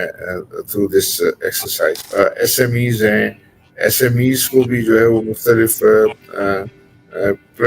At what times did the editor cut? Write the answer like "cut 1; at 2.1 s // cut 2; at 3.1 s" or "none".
cut 1; at 2.0 s